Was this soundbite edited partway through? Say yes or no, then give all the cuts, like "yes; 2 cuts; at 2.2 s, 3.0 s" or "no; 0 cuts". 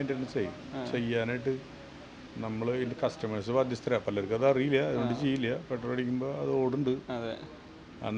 no; 0 cuts